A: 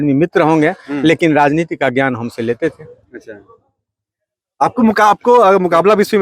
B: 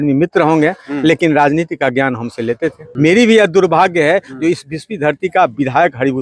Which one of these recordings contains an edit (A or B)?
B